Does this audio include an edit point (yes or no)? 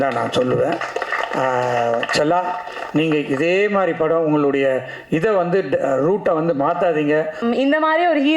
yes